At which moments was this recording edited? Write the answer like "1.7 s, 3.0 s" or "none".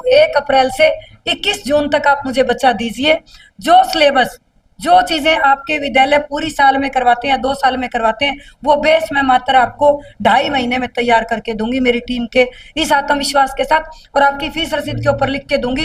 none

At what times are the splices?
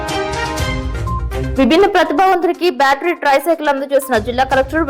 1.5 s

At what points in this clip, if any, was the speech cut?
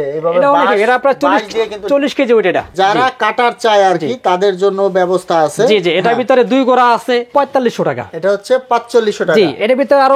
2.7 s, 7.3 s

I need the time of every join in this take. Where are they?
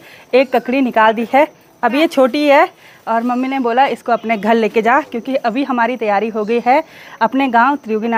none

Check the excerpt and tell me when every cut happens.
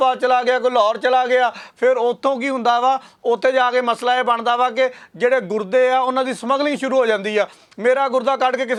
none

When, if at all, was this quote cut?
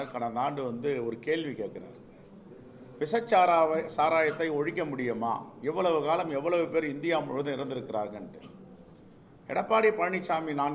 none

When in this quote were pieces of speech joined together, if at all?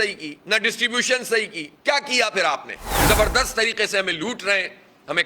1.6 s, 3.0 s

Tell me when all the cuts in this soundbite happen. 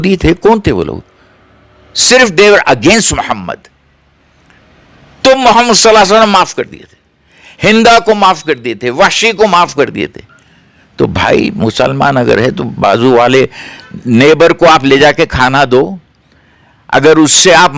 none

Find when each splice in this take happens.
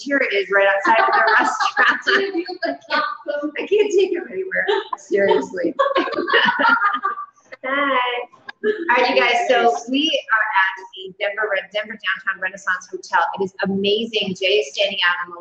13.6 s

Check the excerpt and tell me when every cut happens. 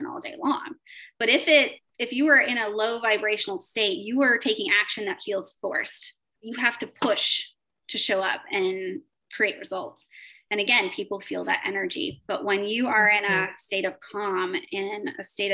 6.3 s, 9.2 s

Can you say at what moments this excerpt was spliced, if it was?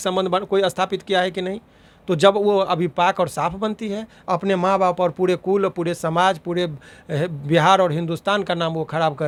none

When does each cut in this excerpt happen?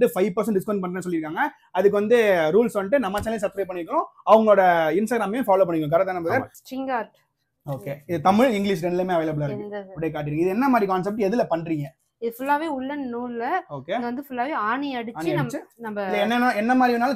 6.5 s

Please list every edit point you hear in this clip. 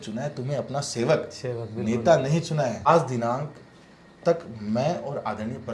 2.9 s

